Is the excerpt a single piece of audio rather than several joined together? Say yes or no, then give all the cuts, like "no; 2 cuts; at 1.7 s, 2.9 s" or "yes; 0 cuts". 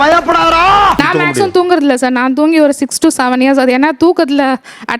no; 2 cuts; at 1.0 s, 3.8 s